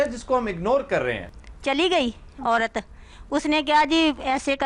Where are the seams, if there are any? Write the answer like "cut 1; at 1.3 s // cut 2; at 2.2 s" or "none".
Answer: cut 1; at 1.3 s

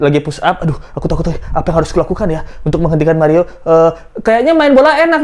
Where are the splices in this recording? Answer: none

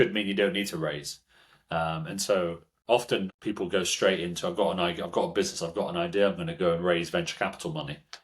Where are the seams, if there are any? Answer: cut 1; at 3.3 s

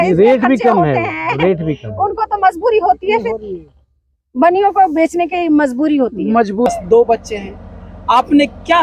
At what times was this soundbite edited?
cut 1; at 6.7 s

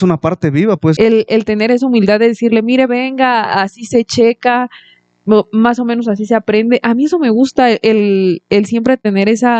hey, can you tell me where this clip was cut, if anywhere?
cut 1; at 1.0 s

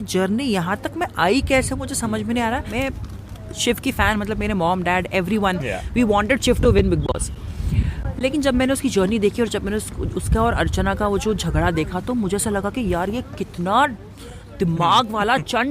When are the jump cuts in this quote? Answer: cut 1; at 2.7 s

